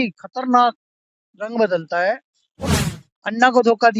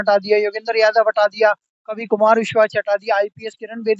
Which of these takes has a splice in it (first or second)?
first